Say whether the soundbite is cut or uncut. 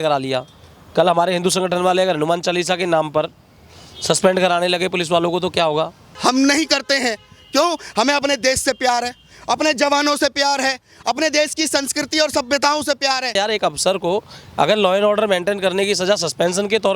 cut